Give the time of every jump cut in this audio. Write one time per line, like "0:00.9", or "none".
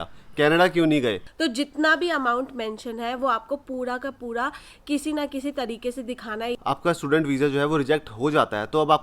0:01.3
0:06.6